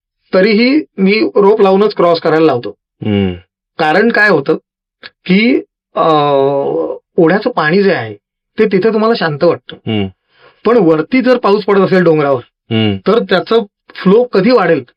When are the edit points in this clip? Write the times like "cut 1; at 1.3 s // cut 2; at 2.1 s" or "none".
none